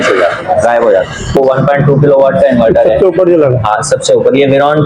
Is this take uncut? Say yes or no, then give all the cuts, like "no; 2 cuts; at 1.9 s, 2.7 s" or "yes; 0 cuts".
no; 1 cut; at 1.4 s